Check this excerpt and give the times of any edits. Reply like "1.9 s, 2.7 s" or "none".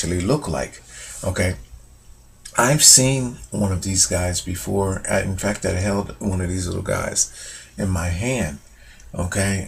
none

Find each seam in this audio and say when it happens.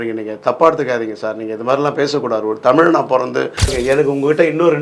3.7 s

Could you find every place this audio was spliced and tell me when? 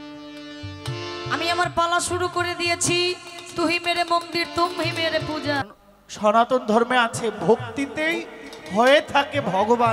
5.7 s

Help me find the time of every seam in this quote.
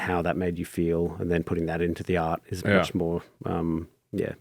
none

